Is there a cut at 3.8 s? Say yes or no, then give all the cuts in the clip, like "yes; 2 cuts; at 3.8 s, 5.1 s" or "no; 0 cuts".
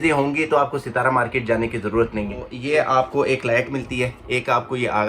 no; 1 cut; at 2.5 s